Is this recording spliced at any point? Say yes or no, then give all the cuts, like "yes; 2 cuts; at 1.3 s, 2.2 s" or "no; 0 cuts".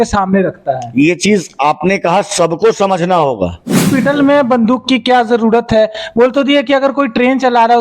yes; 1 cut; at 3.8 s